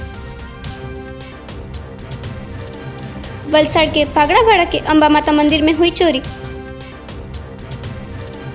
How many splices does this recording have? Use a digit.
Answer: 1